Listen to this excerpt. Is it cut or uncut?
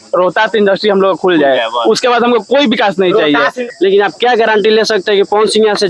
cut